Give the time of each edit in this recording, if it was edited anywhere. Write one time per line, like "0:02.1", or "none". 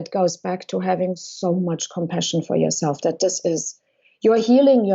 none